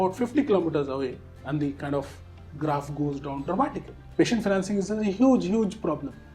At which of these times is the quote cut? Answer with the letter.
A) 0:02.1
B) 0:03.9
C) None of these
B